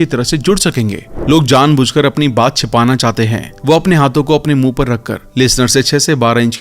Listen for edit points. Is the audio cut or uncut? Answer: cut